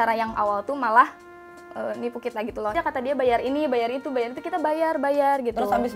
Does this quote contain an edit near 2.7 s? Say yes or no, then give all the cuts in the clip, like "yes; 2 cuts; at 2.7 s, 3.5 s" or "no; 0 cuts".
yes; 1 cut; at 2.7 s